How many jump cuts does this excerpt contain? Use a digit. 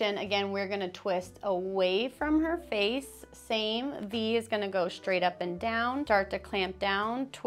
0